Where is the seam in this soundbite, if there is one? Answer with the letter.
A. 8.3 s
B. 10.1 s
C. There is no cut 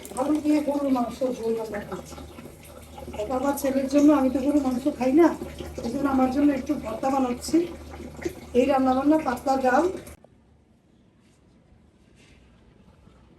B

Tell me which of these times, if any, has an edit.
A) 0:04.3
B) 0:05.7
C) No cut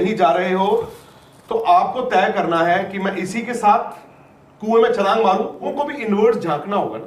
B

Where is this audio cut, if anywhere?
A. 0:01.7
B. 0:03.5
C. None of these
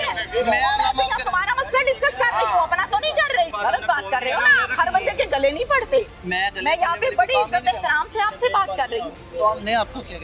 B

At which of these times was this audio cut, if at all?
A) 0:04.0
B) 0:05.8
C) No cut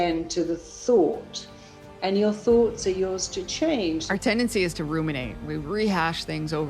A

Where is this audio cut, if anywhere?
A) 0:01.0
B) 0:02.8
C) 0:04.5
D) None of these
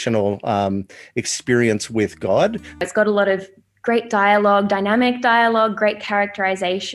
B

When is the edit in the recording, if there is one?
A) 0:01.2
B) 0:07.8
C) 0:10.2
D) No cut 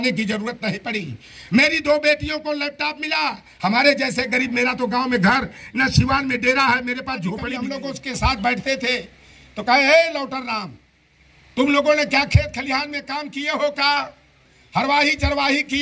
B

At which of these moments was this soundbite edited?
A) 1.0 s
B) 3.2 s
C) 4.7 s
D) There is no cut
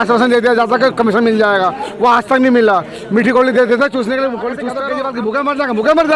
C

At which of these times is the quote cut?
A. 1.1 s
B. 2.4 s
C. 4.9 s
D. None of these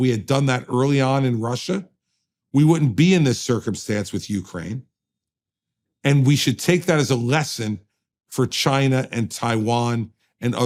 D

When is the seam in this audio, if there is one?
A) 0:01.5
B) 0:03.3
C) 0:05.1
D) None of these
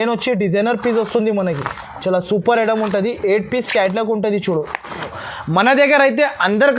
C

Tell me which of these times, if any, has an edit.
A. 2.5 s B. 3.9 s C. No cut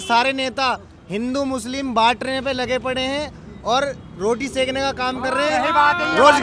C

